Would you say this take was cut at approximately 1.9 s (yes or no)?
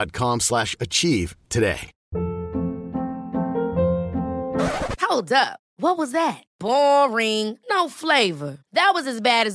yes